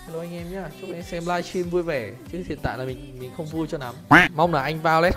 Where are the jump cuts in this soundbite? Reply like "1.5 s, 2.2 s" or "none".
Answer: 4.1 s